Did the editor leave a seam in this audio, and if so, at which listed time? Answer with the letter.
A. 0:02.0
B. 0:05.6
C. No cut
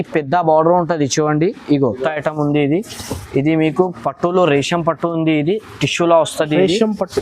A